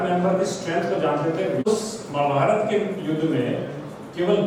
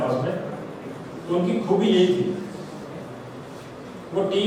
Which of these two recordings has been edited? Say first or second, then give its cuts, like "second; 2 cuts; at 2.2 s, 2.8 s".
first; 1 cut; at 1.7 s